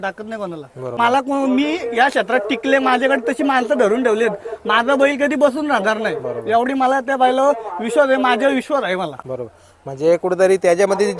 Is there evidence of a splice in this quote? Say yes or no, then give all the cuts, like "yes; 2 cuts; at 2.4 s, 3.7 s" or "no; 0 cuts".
yes; 1 cut; at 1.0 s